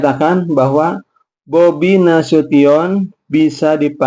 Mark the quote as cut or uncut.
uncut